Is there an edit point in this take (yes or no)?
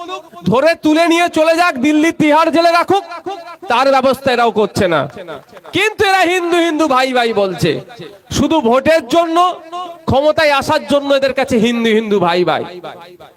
no